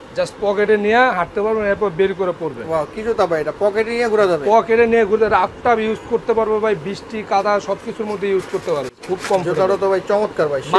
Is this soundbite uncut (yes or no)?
yes